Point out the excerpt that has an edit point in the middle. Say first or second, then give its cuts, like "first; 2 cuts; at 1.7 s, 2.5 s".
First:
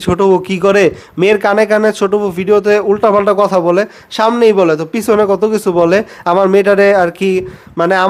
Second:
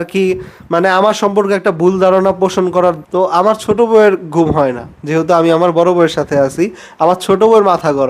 second; 1 cut; at 3.0 s